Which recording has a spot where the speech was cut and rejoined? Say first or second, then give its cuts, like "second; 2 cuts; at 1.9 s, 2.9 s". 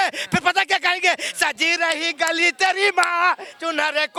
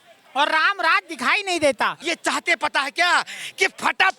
second; 1 cut; at 2.0 s